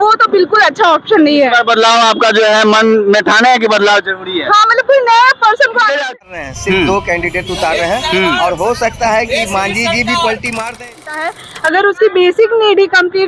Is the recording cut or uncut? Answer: cut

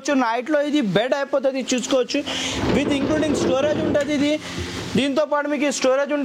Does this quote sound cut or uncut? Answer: uncut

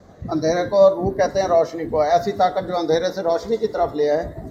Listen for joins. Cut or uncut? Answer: uncut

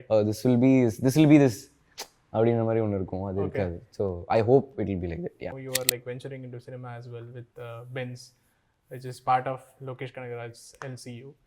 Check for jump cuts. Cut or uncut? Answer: cut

